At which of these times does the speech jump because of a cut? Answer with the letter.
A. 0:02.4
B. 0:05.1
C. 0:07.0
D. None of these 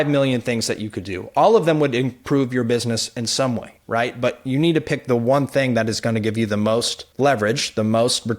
C